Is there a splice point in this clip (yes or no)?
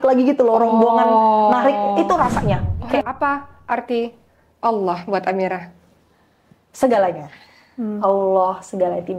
yes